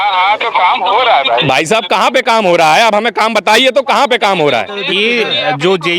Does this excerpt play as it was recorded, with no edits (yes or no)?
no